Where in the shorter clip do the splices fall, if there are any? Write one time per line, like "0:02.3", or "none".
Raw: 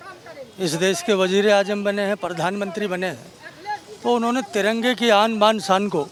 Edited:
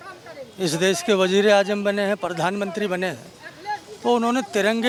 none